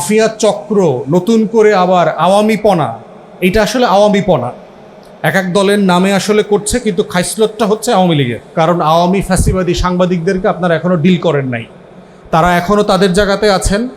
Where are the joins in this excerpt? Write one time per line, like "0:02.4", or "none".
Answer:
0:08.4